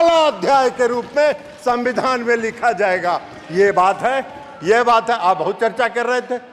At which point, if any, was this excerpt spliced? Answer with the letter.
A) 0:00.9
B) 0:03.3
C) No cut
C